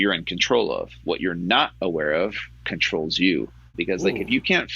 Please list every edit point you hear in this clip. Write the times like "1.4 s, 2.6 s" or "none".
3.7 s

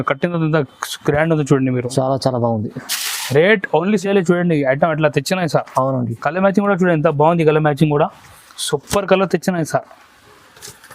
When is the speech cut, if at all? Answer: 4.0 s

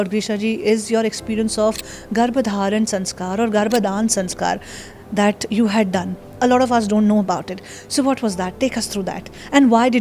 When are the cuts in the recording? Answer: 6.2 s

